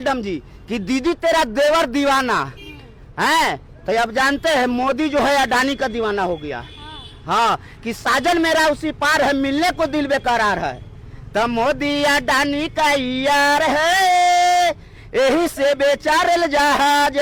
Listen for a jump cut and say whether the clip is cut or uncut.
uncut